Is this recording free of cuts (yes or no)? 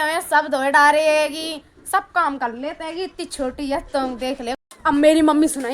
no